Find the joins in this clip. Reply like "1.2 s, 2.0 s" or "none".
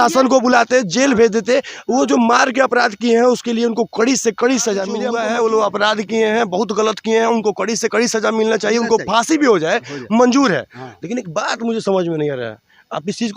5.0 s

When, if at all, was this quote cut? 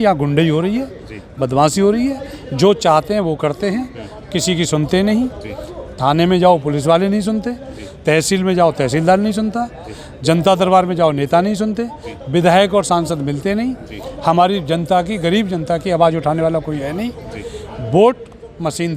none

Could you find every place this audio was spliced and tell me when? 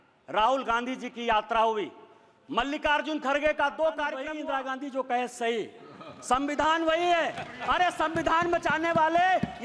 4.3 s

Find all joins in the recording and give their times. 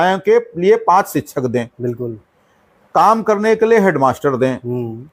none

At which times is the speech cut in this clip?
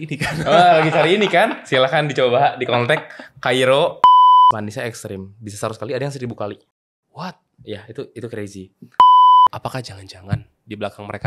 4.0 s, 4.5 s, 9.0 s, 9.5 s

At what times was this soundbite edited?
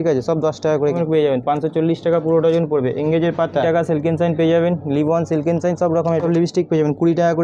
0.9 s, 3.6 s, 6.2 s

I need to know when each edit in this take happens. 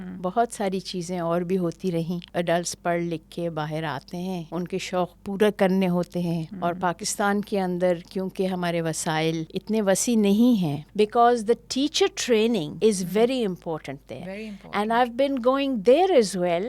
2.3 s, 4.4 s, 6.5 s, 9.5 s, 10.8 s, 12.7 s

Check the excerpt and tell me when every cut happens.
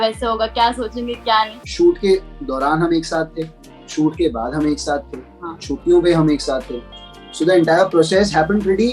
1.6 s

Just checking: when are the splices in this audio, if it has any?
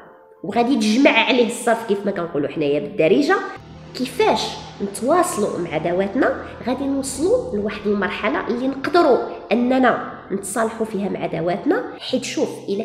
3.6 s, 12.0 s

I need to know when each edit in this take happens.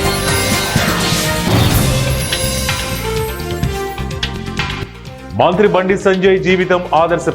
4.8 s

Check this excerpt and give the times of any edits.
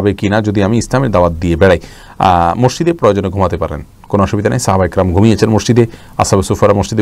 none

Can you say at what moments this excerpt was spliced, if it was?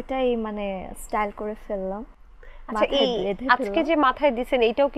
none

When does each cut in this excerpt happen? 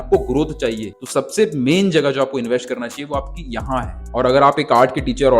0.9 s, 4.1 s

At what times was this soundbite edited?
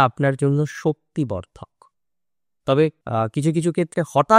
3.0 s

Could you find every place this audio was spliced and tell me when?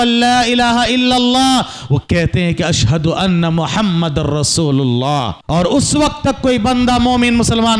5.4 s

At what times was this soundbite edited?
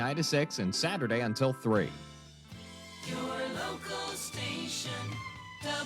2.1 s

